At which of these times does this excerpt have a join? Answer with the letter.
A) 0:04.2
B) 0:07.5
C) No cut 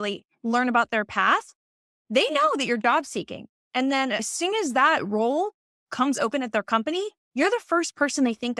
A